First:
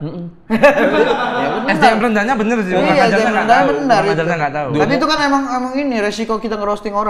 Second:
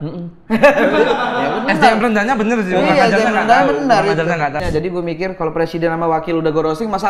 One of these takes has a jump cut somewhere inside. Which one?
second; 1 cut; at 4.6 s

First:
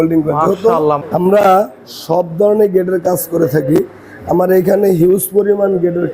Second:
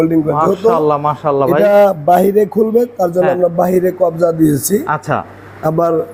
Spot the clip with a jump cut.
first; 1 cut; at 1.0 s

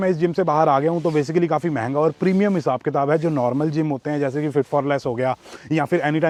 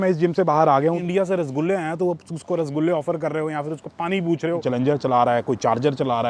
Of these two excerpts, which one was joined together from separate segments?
second; 2 cuts; at 1.0 s, 4.6 s

